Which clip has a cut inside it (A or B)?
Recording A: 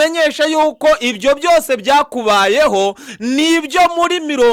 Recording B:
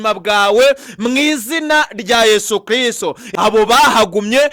B